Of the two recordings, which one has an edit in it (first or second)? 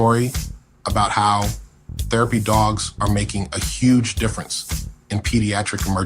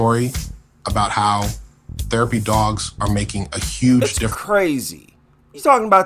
first